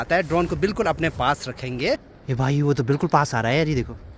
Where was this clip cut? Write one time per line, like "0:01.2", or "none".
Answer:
0:02.1